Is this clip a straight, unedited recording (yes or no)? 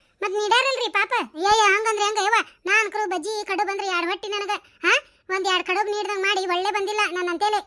no